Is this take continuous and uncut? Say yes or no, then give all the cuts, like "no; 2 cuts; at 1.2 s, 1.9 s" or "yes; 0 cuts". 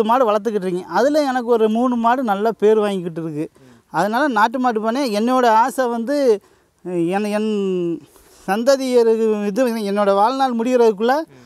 yes; 0 cuts